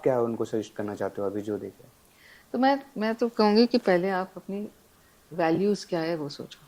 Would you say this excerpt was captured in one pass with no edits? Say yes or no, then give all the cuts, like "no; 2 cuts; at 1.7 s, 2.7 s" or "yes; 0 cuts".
yes; 0 cuts